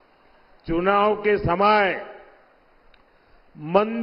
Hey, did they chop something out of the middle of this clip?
no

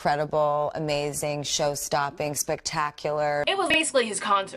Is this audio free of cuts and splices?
yes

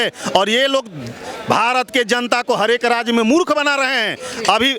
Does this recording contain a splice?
no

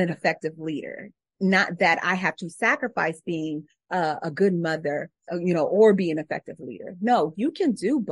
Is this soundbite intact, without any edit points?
no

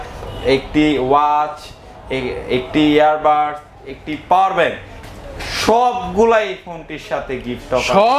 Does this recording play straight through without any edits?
yes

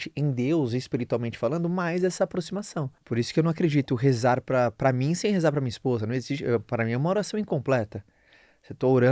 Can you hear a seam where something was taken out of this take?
yes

